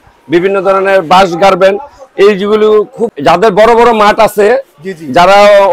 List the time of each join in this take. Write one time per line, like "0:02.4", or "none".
0:03.1